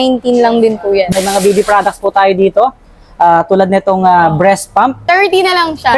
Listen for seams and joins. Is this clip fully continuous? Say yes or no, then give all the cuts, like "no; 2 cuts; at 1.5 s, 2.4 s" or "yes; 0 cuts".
no; 2 cuts; at 1.1 s, 5.0 s